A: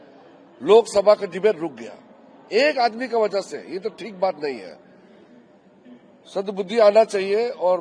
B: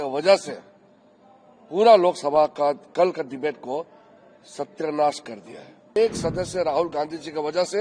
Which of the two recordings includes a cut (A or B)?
B